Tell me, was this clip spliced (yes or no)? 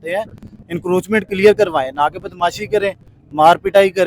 no